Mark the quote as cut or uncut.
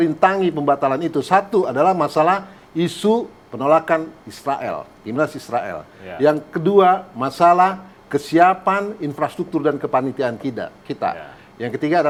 uncut